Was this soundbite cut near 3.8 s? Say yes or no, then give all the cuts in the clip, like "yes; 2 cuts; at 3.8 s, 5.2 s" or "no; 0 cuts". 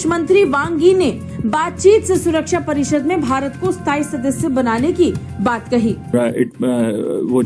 no; 1 cut; at 6.1 s